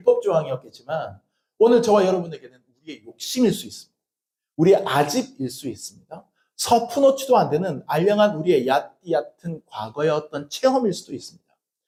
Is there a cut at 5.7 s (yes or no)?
no